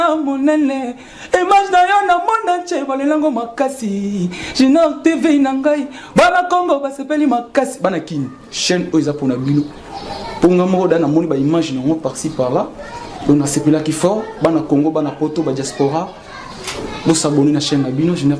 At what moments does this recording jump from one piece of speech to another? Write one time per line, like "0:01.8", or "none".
none